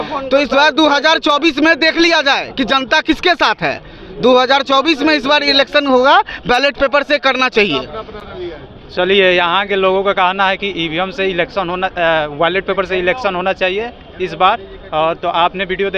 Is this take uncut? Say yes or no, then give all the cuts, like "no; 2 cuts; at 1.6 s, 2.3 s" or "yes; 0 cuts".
yes; 0 cuts